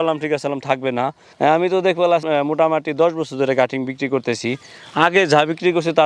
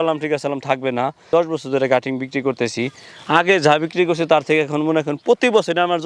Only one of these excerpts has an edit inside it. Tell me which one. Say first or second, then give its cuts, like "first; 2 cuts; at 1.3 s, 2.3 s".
second; 1 cut; at 1.2 s